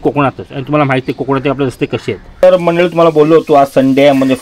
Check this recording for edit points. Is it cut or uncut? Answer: cut